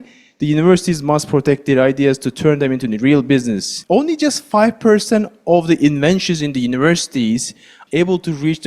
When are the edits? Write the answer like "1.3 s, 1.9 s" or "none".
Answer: 3.7 s, 7.8 s